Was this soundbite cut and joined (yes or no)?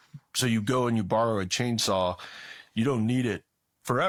no